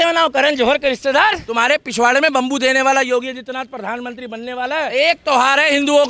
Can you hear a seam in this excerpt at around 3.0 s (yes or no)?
no